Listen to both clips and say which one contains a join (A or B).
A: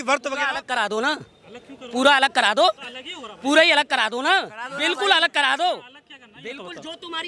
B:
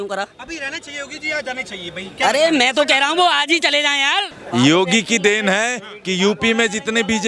B